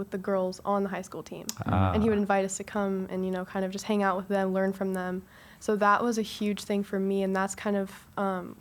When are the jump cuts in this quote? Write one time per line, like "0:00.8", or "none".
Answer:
none